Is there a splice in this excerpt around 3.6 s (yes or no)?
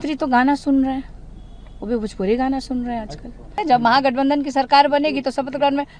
yes